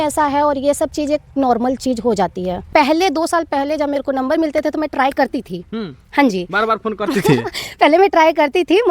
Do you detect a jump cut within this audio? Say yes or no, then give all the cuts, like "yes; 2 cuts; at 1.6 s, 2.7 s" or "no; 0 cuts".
yes; 1 cut; at 2.7 s